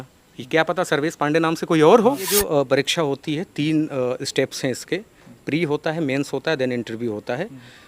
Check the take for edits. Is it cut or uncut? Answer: cut